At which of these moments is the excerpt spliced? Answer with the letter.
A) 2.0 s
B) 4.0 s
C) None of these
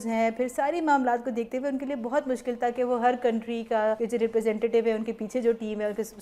B